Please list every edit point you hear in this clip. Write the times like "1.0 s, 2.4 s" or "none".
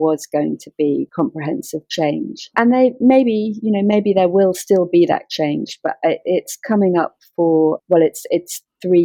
none